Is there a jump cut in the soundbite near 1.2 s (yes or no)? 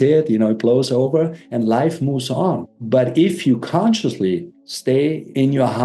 no